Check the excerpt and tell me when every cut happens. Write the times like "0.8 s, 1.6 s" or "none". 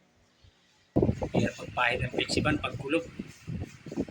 1.0 s